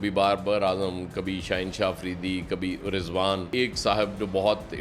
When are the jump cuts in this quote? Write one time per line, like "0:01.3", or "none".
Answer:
0:03.5